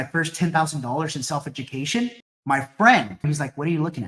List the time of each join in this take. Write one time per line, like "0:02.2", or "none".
0:02.3
0:03.2